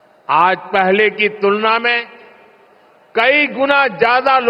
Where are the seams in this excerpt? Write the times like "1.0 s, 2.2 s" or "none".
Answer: 1.2 s